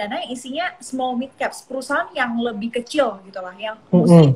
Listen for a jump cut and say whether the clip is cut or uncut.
uncut